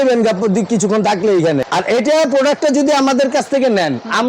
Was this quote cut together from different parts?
yes; 1 cut; at 1.6 s

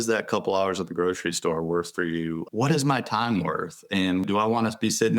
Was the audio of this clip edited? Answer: yes; 2 cuts; at 2.4 s, 4.2 s

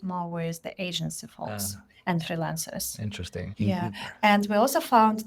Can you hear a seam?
no; 0 cuts

